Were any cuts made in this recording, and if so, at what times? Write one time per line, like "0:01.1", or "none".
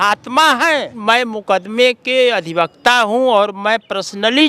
0:00.9